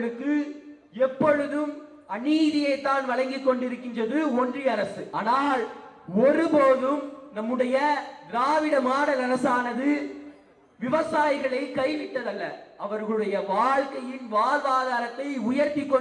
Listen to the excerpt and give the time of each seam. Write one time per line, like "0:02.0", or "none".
0:05.0